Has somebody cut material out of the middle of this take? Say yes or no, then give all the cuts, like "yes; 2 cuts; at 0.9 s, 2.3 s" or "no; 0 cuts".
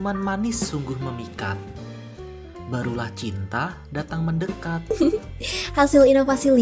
no; 0 cuts